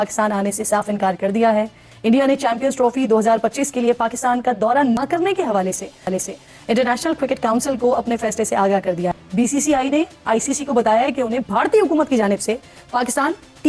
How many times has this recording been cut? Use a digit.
0